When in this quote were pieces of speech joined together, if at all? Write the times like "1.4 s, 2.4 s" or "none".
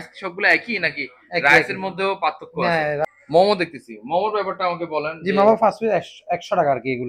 3.0 s

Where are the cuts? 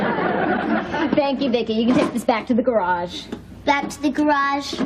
3.7 s

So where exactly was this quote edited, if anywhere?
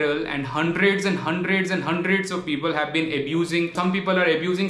3.8 s

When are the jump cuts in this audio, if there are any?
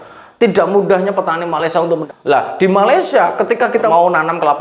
2.0 s, 3.9 s

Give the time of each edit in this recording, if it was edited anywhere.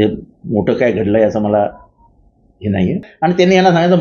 3.0 s

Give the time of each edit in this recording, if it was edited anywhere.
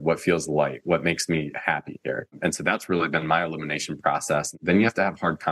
2.3 s, 4.6 s

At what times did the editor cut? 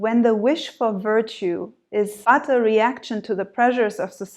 2.2 s

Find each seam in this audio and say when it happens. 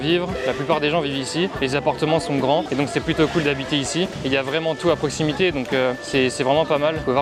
none

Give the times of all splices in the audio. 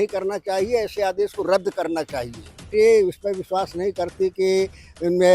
2.7 s

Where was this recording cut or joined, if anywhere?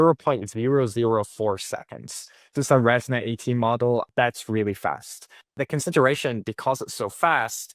4.1 s, 5.5 s

